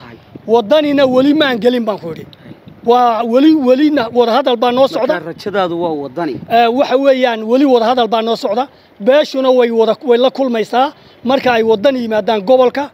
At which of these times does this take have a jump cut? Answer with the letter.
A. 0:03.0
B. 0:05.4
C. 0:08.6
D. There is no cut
D